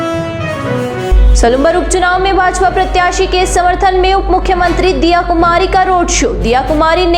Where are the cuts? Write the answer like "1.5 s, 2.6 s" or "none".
1.0 s